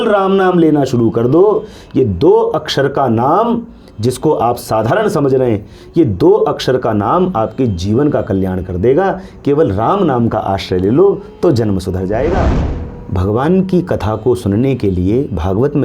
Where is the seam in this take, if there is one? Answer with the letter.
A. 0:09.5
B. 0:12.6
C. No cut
B